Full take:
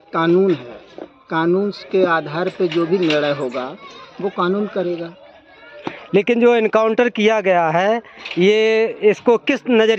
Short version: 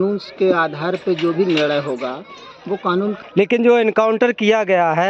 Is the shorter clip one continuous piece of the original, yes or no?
no